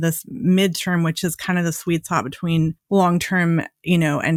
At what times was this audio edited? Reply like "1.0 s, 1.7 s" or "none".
none